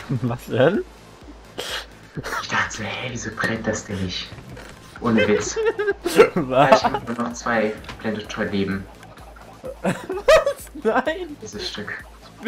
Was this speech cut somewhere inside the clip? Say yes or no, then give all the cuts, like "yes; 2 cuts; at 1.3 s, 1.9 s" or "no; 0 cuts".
no; 0 cuts